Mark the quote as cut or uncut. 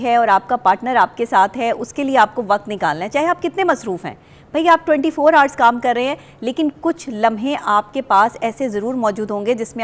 uncut